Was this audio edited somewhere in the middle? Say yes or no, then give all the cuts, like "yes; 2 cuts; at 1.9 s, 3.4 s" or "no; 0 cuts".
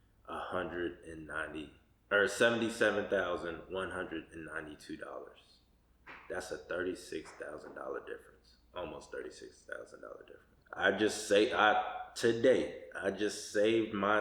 yes; 1 cut; at 10.5 s